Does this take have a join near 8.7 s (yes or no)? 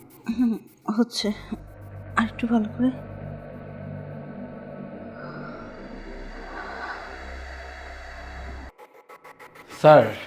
yes